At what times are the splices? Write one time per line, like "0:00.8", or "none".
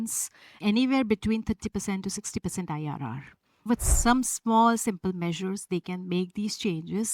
0:03.7